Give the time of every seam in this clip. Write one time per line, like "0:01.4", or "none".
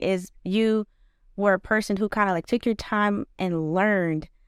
none